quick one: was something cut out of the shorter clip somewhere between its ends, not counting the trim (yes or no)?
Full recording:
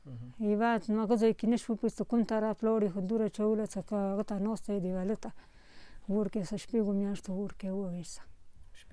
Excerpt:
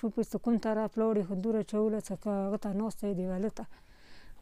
no